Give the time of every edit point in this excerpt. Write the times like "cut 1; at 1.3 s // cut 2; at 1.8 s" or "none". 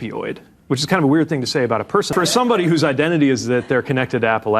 cut 1; at 2.1 s